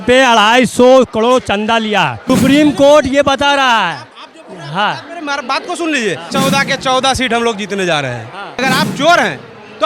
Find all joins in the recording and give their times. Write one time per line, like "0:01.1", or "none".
0:02.2
0:06.3
0:08.6